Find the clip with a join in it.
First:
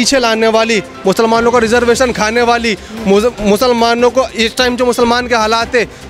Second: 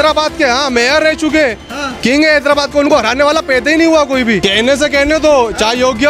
second; 1 cut; at 4.4 s

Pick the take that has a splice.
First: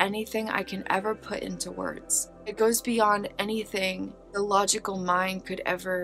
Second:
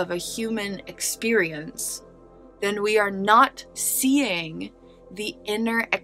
first; 2 cuts; at 2.5 s, 4.2 s

